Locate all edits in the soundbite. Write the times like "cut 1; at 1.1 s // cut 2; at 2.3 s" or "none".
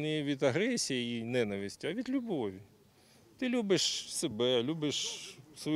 none